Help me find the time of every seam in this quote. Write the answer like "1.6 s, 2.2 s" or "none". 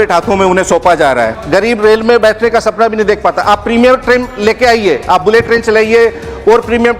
1.4 s